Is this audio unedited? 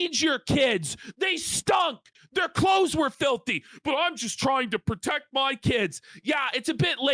yes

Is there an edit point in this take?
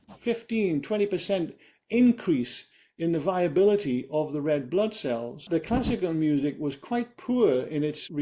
yes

